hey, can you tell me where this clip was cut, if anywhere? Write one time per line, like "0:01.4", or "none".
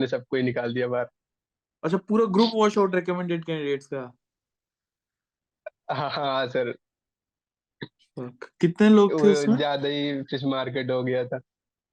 none